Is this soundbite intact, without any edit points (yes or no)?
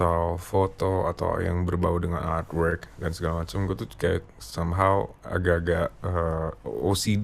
yes